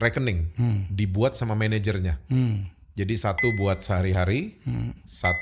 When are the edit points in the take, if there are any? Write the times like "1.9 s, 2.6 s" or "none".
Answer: none